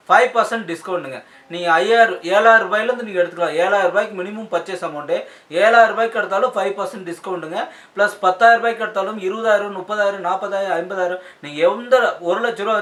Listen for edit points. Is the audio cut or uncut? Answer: uncut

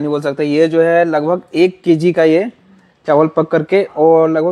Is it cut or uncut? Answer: uncut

